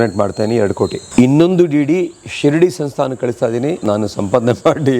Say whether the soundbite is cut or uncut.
cut